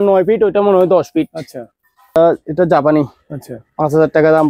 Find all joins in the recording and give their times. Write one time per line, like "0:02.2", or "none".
0:02.2